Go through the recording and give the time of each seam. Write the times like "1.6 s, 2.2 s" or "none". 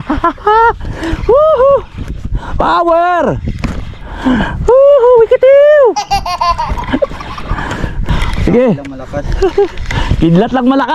8.1 s